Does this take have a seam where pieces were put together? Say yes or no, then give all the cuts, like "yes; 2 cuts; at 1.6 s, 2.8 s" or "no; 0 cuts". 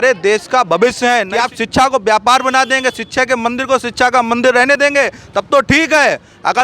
yes; 1 cut; at 1.3 s